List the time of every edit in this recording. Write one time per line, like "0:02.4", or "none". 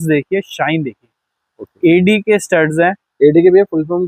none